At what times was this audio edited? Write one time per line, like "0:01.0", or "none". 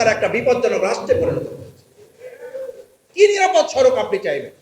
0:03.0